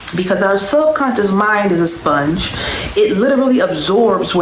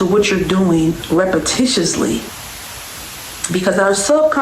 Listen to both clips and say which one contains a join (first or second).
second